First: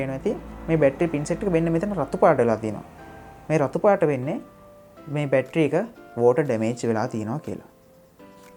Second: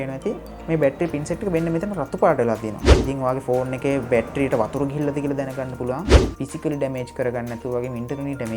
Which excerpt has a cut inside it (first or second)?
second